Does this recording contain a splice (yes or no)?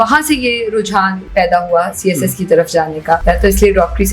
yes